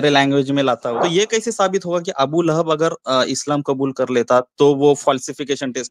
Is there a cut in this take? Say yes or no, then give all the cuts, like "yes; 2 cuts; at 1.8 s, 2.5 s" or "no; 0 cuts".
yes; 1 cut; at 0.9 s